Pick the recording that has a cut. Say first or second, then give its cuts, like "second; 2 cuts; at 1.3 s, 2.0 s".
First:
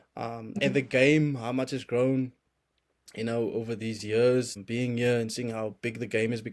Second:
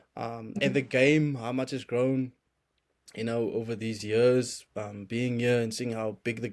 first; 1 cut; at 4.6 s